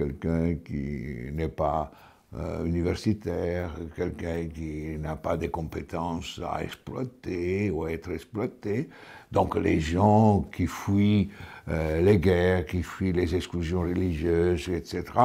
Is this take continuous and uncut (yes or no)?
yes